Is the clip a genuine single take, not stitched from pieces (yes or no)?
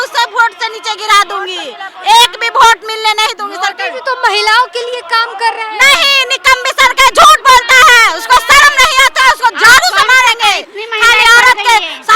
yes